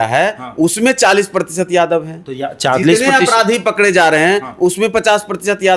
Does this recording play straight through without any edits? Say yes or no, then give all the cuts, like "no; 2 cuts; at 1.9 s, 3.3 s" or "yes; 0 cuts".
yes; 0 cuts